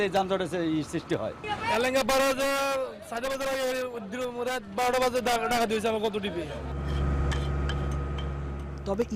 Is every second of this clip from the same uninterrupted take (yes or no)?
yes